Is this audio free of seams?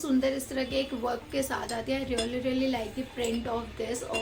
yes; 0 cuts

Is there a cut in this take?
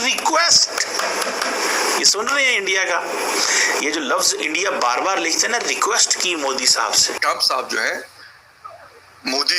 yes; 1 cut; at 7.2 s

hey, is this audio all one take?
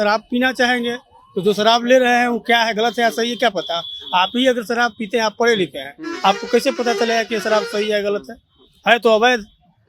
yes; 0 cuts

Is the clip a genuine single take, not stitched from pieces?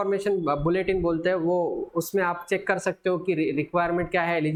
yes; 0 cuts

